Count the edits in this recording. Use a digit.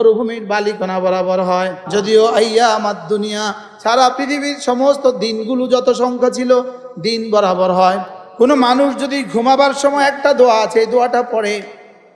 2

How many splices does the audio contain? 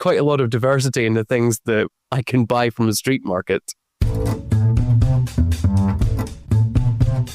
1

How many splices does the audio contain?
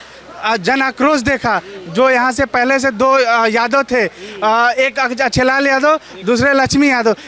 0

